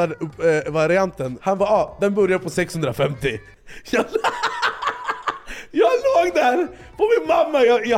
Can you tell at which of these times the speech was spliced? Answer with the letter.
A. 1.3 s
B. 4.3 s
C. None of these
A